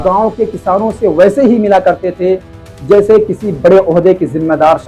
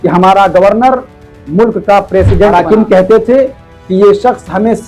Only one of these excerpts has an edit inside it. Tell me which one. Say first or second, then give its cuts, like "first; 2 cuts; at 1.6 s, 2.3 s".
second; 1 cut; at 2.5 s